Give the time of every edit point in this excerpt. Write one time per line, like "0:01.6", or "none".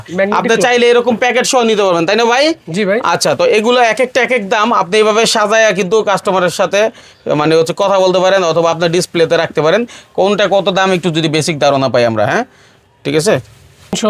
none